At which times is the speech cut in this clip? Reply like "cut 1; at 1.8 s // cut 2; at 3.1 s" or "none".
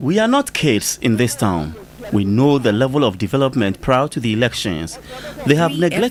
none